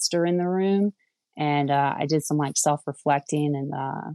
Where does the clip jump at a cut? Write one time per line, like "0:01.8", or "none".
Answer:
none